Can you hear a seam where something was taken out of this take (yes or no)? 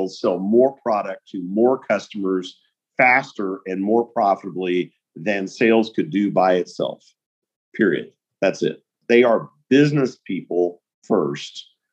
yes